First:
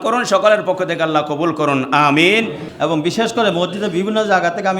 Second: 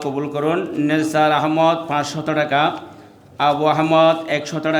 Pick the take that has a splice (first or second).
first